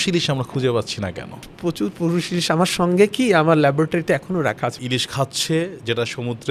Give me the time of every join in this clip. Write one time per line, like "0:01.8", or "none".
0:01.5
0:04.8